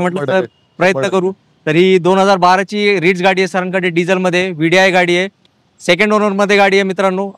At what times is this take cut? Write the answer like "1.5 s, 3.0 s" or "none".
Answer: none